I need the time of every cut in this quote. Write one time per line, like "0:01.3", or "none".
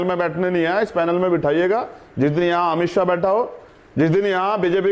none